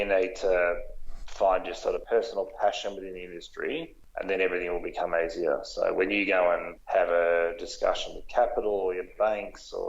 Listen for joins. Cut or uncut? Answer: cut